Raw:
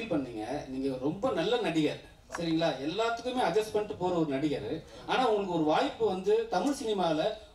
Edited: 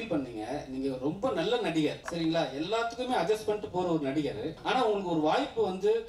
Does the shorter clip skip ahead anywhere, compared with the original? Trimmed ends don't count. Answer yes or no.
yes